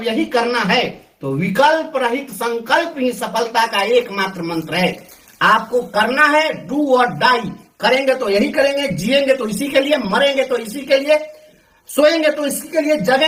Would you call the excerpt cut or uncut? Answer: uncut